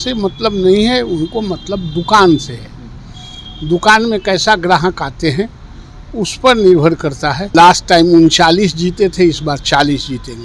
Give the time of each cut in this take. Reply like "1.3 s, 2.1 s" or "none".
7.4 s